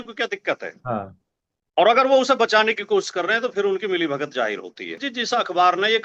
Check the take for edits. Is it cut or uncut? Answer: cut